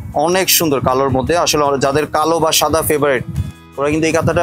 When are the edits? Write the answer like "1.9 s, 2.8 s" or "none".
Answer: none